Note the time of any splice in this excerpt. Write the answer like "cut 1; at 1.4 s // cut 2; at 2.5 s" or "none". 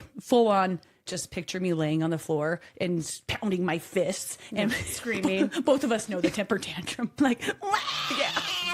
cut 1; at 1.1 s // cut 2; at 3.2 s // cut 3; at 7.1 s